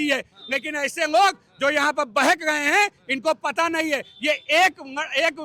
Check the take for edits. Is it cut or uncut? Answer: uncut